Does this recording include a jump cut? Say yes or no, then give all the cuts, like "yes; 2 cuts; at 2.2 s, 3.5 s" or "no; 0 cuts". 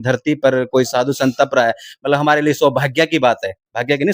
no; 0 cuts